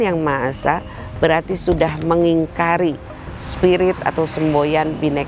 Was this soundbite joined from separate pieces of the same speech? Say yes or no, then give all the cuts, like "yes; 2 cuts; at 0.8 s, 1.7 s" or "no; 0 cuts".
no; 0 cuts